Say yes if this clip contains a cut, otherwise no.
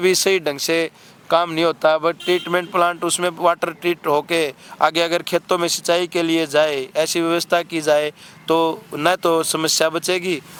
no